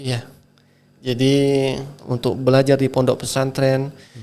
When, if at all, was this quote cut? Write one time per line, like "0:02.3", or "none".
0:02.1